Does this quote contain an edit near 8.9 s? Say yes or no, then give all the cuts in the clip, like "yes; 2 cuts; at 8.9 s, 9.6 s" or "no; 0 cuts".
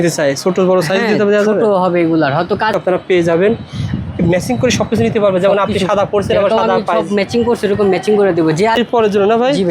yes; 2 cuts; at 2.7 s, 8.9 s